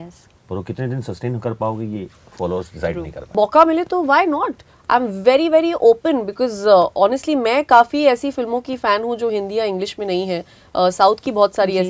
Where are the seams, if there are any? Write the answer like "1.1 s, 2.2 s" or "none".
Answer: 3.3 s